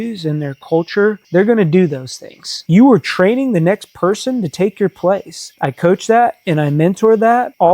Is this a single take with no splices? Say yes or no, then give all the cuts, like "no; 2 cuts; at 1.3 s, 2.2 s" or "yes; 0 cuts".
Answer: no; 1 cut; at 2.6 s